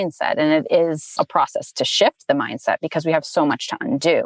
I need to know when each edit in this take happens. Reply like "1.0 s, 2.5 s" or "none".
1.1 s